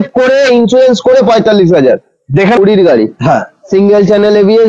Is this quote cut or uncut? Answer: cut